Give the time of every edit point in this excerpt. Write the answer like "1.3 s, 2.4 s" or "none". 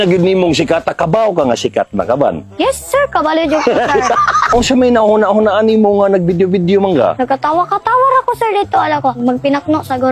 4.5 s, 7.2 s, 9.2 s